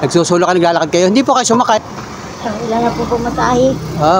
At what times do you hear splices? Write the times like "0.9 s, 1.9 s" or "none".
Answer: 1.8 s